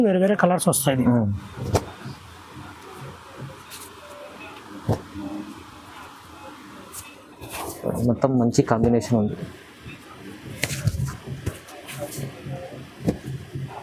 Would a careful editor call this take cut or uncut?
uncut